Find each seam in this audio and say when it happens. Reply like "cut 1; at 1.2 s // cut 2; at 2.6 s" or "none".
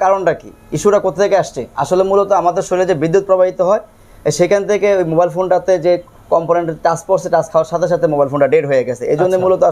none